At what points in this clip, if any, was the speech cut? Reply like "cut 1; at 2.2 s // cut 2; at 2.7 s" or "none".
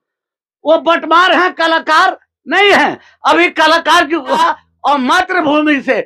cut 1; at 4.4 s